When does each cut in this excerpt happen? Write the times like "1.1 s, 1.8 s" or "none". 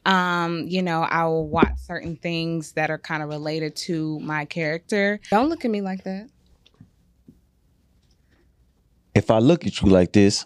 5.3 s